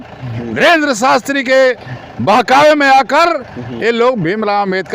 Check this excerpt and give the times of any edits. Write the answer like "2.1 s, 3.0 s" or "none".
none